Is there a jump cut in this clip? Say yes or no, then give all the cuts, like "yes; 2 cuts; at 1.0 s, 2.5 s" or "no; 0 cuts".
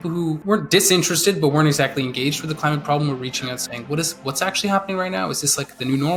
no; 0 cuts